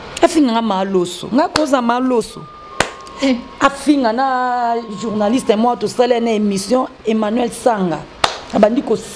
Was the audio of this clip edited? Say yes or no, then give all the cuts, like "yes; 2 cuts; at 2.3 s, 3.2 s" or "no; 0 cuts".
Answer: no; 0 cuts